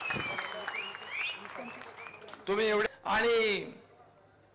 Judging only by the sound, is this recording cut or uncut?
cut